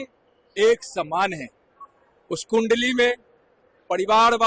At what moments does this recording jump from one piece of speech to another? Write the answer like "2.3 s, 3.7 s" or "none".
none